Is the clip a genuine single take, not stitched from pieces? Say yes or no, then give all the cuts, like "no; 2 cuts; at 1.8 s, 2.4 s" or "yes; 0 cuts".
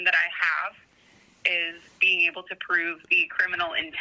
yes; 0 cuts